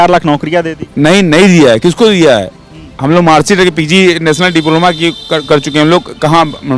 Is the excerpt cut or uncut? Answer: uncut